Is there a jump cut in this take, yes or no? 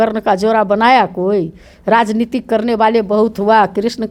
no